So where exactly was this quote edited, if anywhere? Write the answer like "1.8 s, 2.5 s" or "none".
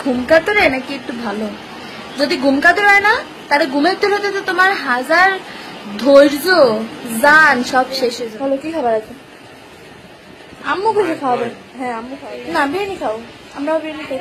8.2 s, 12.1 s

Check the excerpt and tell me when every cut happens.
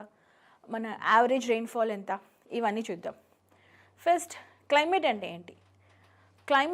3.2 s

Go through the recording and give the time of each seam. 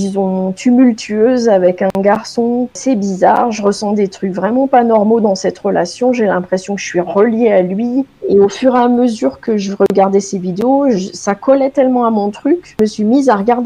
2.8 s, 8.2 s, 12.7 s

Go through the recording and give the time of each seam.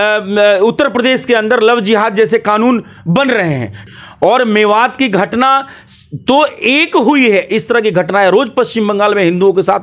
3.8 s

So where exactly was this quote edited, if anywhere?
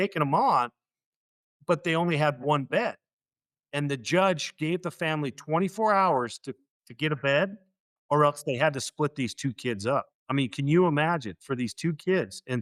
none

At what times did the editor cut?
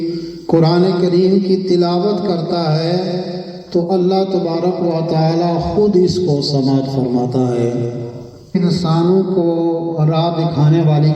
8.6 s

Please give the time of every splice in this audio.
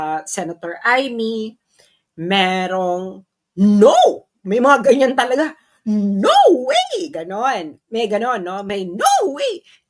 none

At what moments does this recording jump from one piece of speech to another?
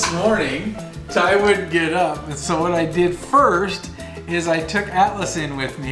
none

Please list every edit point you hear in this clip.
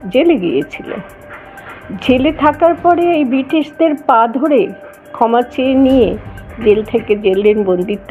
none

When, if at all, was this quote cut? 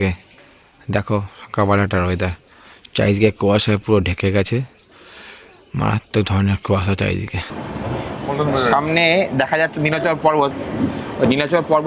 7.5 s

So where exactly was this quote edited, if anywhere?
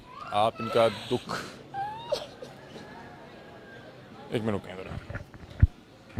none

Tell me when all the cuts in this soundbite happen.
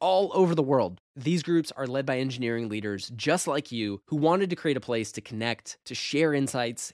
none

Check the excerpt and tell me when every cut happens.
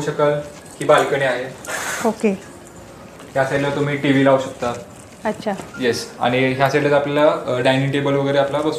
3.2 s

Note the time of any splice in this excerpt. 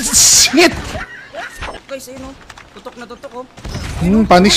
1.8 s

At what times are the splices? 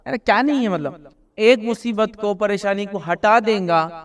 none

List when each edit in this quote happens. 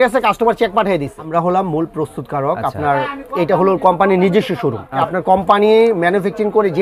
1.2 s, 5.1 s

